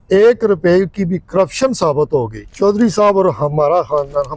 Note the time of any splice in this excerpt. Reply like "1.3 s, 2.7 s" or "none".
2.4 s